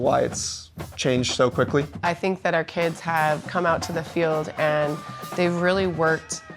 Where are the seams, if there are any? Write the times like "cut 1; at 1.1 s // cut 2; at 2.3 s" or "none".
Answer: cut 1; at 1.9 s